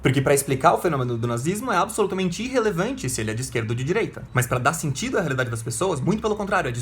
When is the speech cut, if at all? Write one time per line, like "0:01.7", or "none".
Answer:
0:04.2

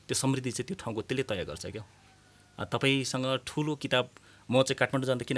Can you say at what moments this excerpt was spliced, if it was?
none

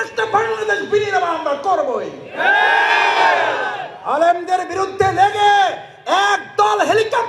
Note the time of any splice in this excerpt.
none

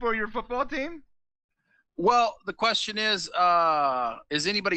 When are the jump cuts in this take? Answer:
none

